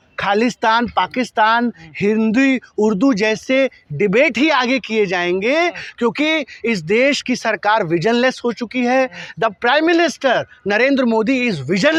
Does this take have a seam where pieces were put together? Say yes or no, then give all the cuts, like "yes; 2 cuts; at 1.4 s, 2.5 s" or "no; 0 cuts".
no; 0 cuts